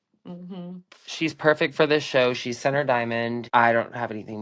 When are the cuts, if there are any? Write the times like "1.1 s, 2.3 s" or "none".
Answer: 3.4 s

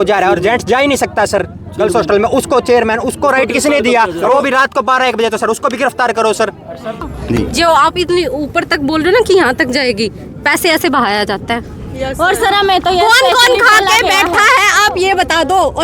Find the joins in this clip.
7.0 s

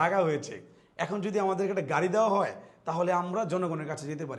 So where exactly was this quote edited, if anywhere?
none

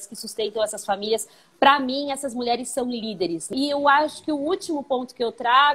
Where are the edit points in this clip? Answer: 3.4 s

